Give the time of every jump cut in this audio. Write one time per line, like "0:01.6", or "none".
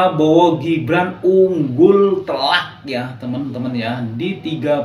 none